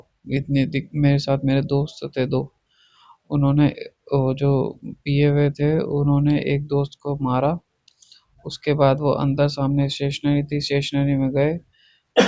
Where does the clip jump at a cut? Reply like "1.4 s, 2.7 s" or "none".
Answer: none